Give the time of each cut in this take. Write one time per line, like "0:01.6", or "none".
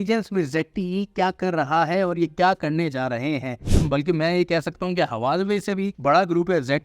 0:03.7
0:05.9

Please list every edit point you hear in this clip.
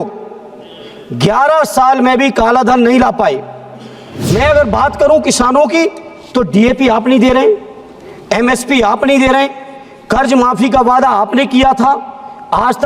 0:04.3

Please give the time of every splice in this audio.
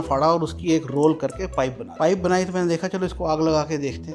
0:01.8

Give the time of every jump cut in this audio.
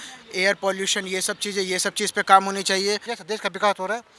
0:03.1

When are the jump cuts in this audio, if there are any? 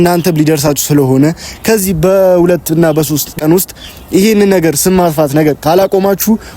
0:03.3

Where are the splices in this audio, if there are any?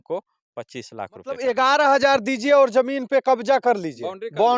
0:01.4

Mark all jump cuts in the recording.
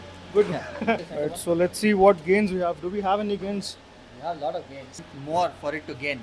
0:01.2
0:04.9

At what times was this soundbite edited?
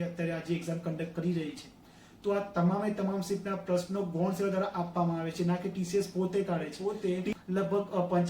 0:06.8

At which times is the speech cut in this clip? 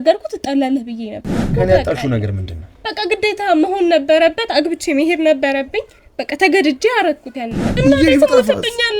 0:01.5
0:07.7

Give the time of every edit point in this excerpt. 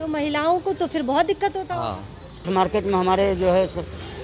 0:02.5

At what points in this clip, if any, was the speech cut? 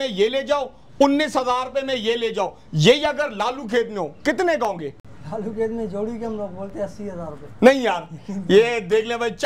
none

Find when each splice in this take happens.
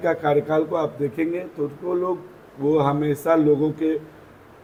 none

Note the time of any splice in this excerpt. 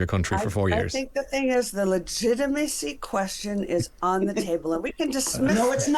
none

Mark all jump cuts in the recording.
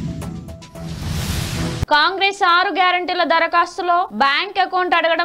0:01.8

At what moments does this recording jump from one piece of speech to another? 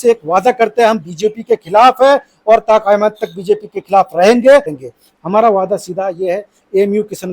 0:04.8

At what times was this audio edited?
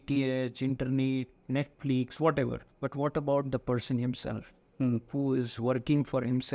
0:02.6

